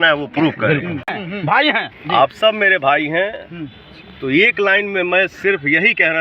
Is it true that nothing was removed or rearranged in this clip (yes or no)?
no